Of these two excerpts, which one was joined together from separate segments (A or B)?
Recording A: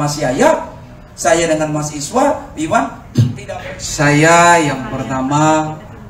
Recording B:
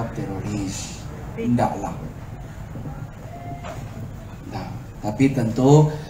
A